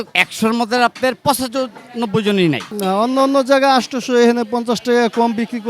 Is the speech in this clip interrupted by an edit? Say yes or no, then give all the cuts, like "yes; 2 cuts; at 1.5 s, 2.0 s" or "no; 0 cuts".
yes; 1 cut; at 2.7 s